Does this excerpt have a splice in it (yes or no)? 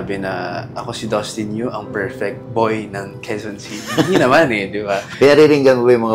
no